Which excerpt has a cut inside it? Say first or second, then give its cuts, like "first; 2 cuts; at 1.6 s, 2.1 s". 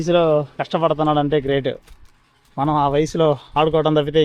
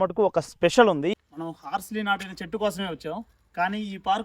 second; 1 cut; at 1.1 s